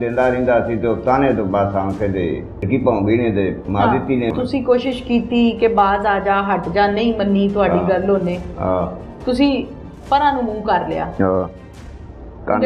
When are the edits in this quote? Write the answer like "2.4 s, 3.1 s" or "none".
2.7 s, 4.3 s